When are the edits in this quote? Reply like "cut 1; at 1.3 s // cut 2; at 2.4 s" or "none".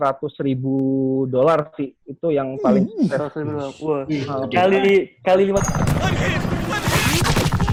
none